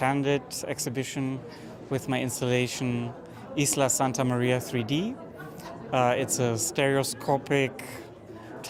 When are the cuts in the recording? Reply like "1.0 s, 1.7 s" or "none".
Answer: none